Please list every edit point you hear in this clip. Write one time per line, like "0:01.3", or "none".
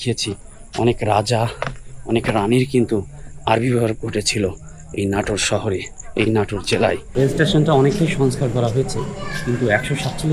0:07.1